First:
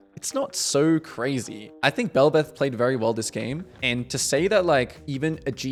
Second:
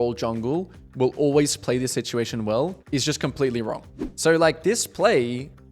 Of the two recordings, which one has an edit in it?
second; 2 cuts; at 2.8 s, 4.0 s

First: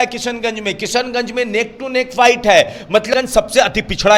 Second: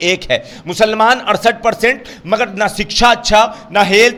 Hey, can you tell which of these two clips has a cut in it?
first; 1 cut; at 3.1 s

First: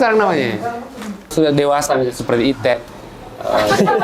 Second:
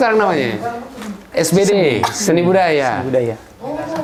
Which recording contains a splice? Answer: first; 1 cut; at 1.3 s

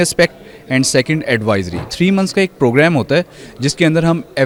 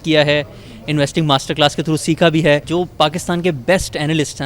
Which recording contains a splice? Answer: second; 1 cut; at 2.7 s

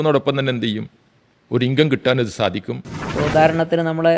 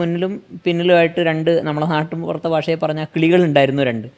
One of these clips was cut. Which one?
first; 1 cut; at 3.0 s

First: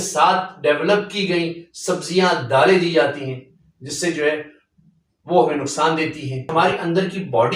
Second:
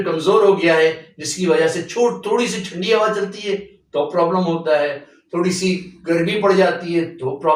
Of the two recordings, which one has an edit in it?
first; 1 cut; at 6.5 s

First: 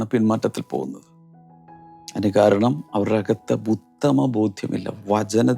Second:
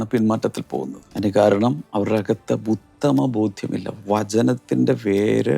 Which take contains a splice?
second; 1 cut; at 1.0 s

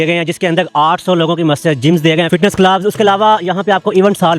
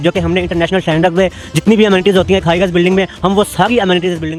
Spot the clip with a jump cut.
first; 1 cut; at 2.3 s

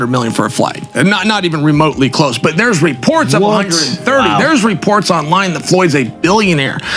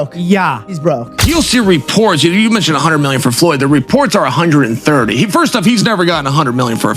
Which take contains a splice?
second; 1 cut; at 1.2 s

